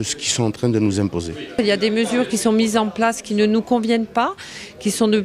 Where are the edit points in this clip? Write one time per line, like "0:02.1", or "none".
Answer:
none